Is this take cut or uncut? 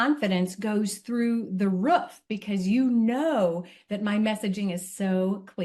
uncut